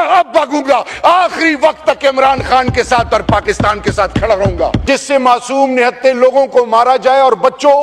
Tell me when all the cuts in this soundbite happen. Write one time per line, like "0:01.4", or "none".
0:04.8